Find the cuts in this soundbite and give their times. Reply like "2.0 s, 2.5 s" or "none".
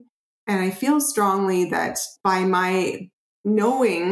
2.1 s